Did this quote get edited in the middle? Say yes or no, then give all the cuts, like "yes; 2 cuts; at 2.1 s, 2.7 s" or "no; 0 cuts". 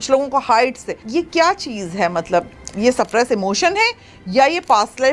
yes; 1 cut; at 0.9 s